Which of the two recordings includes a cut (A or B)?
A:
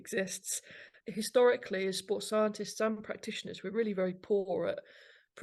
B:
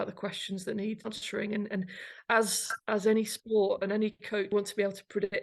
B